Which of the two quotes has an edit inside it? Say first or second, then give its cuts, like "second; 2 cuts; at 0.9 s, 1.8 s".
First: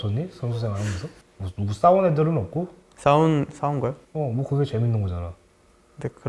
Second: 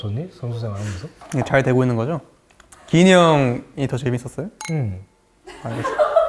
second; 1 cut; at 1.1 s